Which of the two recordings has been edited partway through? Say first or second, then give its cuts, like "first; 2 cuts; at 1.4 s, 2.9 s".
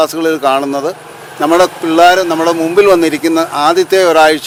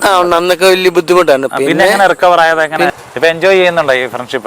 second; 1 cut; at 2.9 s